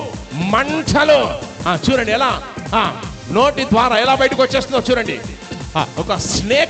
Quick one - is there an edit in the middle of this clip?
yes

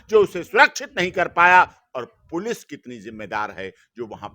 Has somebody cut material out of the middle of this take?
no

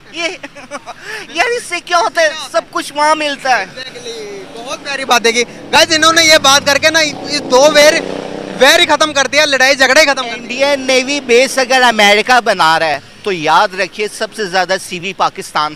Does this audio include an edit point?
no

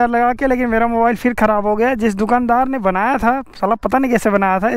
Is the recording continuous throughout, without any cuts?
yes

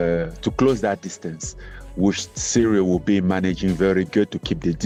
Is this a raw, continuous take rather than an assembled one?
yes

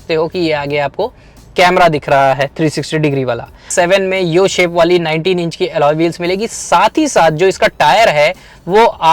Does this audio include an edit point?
yes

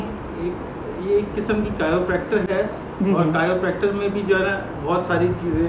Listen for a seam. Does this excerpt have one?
no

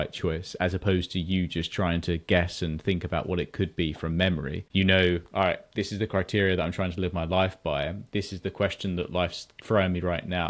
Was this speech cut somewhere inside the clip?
yes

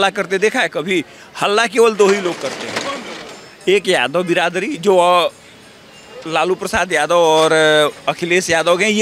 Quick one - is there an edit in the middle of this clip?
no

